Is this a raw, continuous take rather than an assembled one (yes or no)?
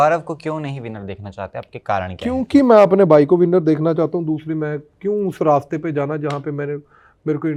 yes